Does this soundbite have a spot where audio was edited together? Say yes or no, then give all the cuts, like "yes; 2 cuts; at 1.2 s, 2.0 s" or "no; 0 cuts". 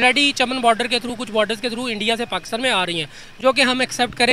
no; 0 cuts